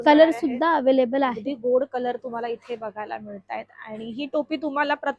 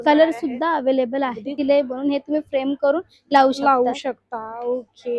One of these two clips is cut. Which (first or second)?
second